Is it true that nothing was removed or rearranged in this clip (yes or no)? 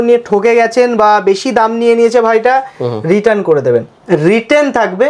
no